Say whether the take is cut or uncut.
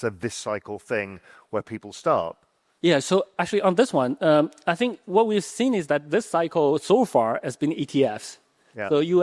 uncut